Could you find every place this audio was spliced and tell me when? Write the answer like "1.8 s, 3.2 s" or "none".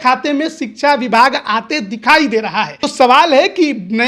2.8 s